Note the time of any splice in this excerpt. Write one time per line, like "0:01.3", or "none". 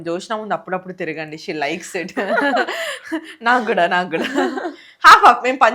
none